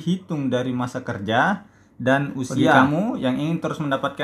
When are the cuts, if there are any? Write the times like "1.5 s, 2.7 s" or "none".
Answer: 2.8 s